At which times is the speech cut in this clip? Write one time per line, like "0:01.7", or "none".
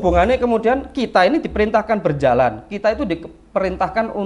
none